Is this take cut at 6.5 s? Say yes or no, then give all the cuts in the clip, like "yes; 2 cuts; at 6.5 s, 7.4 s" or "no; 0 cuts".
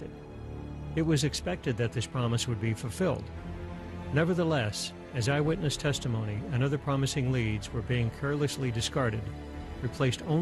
yes; 1 cut; at 6.5 s